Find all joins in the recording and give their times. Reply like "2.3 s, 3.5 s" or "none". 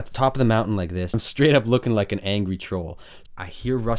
1.2 s, 3.1 s

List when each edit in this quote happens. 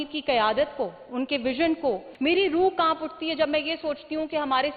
2.1 s

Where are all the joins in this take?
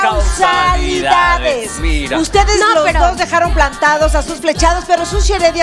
2.4 s

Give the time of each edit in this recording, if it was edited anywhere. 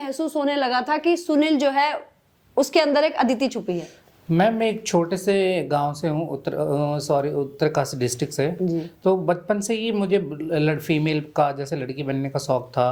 none

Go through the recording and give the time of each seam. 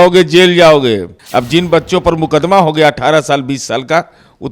1.2 s

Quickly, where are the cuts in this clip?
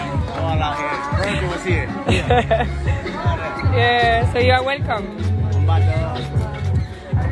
none

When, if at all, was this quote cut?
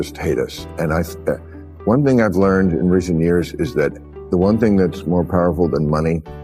none

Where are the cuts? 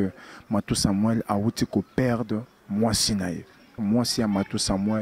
3.8 s

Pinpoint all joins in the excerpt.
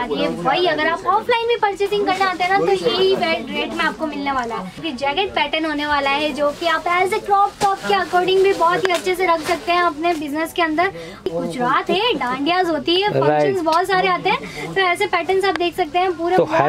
4.8 s, 11.3 s

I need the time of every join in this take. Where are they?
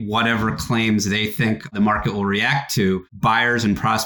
1.7 s, 3.1 s

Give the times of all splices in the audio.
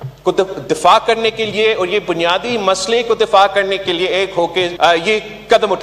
4.7 s

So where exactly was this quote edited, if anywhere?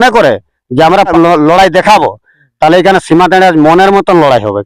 1.1 s

